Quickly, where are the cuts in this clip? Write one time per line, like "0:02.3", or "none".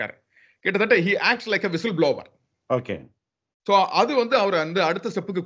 none